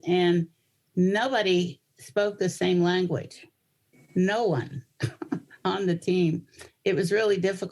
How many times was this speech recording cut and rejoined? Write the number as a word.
zero